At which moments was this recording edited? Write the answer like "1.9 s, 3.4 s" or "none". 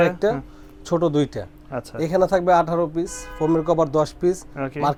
none